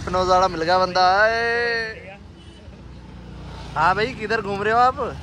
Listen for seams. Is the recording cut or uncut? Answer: uncut